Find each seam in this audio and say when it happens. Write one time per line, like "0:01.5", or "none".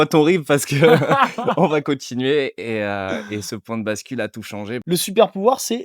0:04.8